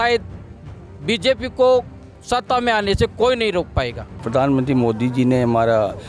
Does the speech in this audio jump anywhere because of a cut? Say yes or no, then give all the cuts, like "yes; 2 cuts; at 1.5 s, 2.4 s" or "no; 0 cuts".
yes; 1 cut; at 4.2 s